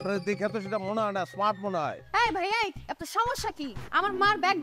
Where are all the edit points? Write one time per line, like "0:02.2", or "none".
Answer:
0:02.0